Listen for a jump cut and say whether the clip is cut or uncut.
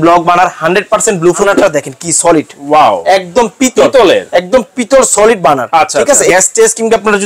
cut